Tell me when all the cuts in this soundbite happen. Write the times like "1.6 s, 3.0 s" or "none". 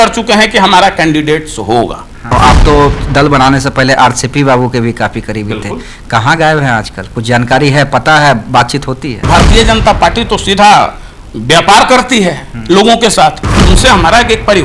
2.2 s, 9.2 s, 13.5 s